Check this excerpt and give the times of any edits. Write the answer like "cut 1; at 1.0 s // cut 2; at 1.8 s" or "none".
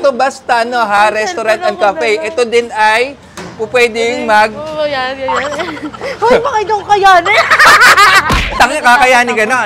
none

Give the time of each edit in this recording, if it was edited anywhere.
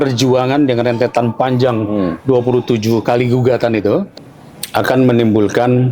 cut 1; at 4.2 s

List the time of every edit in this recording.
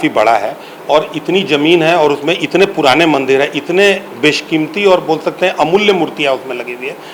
none

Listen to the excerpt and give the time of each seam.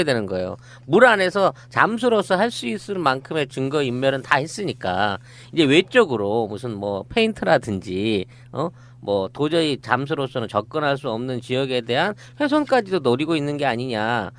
cut 1; at 9.7 s

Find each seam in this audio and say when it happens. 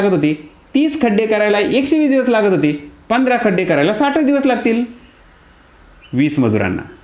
none

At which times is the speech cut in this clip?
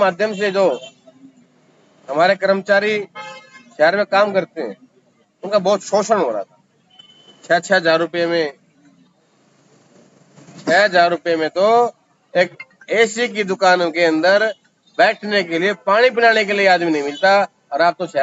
none

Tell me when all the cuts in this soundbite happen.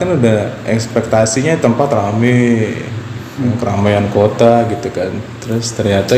none

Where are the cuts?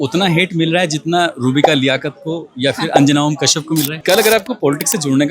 cut 1; at 4.0 s

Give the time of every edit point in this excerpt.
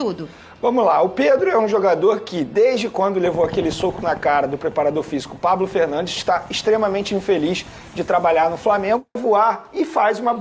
cut 1; at 9.2 s

